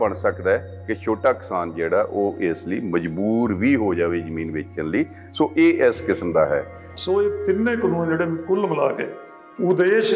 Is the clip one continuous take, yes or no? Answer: yes